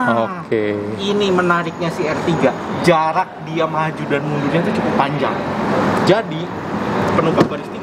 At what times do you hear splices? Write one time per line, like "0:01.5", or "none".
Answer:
none